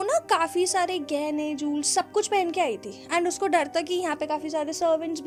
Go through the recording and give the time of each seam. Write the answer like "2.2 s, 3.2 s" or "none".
none

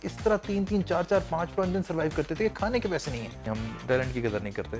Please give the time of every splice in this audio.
3.5 s

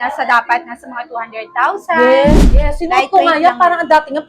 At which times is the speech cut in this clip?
2.3 s

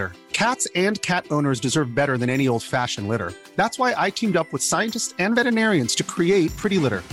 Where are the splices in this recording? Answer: none

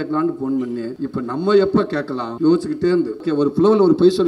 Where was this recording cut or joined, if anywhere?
0.9 s, 2.2 s, 3.2 s

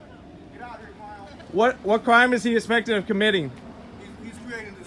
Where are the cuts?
1.4 s

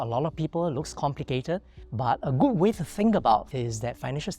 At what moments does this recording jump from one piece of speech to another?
1.8 s, 3.5 s

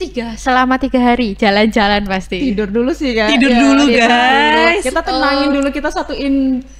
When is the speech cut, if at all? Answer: none

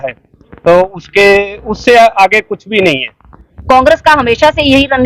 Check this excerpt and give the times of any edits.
3.5 s

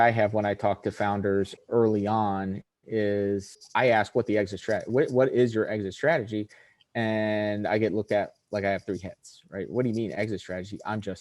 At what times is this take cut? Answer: 1.6 s, 3.6 s

